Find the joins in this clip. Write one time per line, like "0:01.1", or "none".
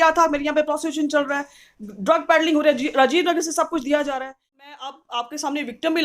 0:04.5